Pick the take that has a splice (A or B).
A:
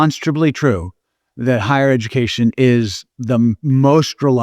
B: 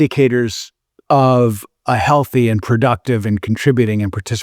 A